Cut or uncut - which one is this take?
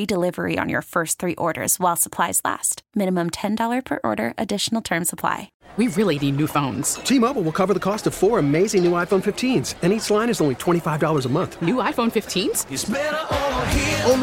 cut